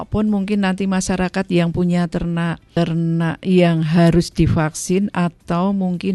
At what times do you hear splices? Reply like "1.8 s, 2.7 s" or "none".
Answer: 2.6 s